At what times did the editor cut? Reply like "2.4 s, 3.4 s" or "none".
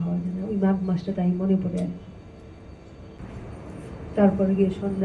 3.2 s